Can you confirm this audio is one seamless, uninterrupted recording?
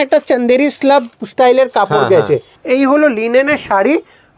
no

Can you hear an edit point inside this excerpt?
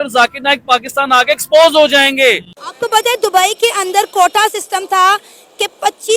no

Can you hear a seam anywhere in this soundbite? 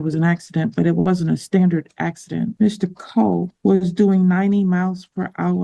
yes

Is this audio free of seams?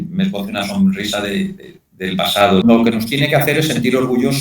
no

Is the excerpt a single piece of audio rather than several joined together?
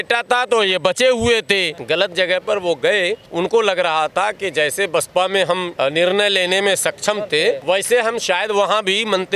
no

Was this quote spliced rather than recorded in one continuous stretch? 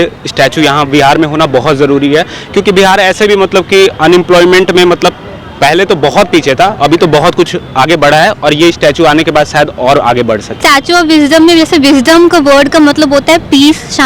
yes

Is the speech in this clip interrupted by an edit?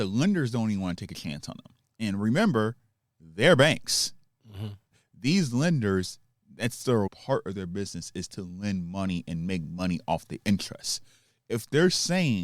yes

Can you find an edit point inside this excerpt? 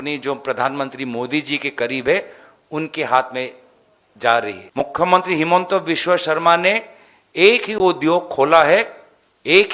yes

